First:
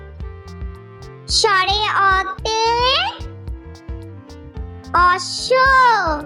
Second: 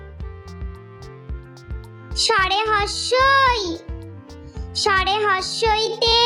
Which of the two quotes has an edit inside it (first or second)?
first